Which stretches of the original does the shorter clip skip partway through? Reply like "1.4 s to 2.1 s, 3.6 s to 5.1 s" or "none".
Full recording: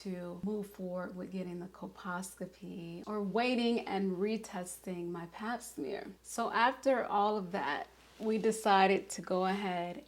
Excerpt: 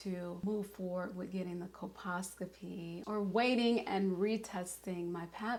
none